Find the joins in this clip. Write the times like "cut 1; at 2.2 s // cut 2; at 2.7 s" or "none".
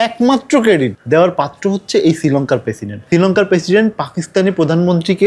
none